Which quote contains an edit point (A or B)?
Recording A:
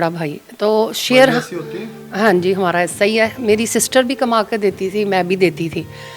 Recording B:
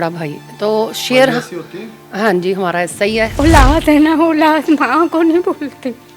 B